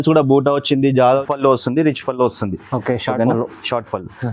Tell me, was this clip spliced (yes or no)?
yes